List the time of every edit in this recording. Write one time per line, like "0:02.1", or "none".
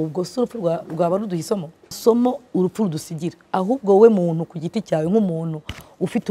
0:02.0